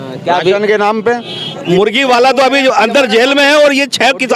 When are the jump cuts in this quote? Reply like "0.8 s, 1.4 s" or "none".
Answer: 1.4 s